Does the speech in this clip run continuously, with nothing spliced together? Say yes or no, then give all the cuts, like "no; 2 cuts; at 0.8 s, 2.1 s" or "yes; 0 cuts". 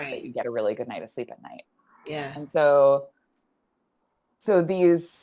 yes; 0 cuts